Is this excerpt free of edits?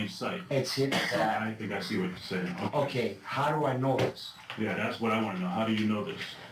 yes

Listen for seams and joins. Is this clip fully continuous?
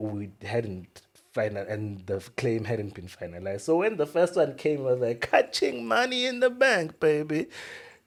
yes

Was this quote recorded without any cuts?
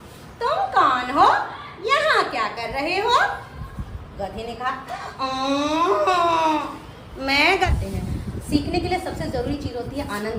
no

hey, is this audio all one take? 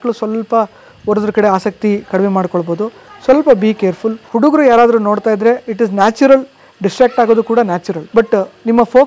no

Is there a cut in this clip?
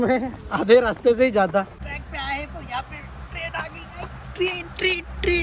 yes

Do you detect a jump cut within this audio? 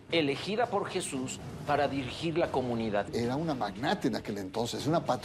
yes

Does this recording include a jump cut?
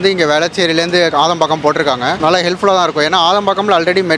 yes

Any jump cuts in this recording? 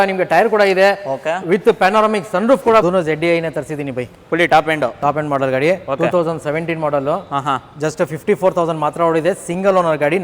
yes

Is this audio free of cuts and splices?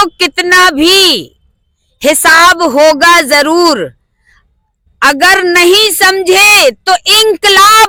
yes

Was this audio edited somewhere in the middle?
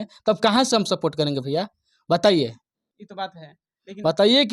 no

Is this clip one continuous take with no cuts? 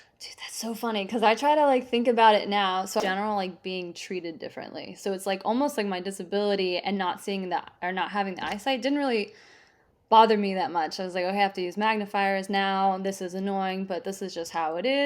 no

